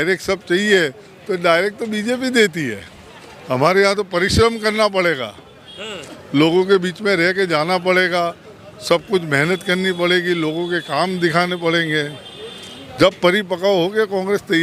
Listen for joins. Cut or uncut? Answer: uncut